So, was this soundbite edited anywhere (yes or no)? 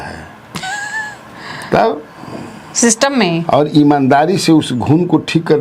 no